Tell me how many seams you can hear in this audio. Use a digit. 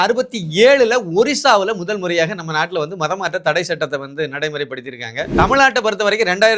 1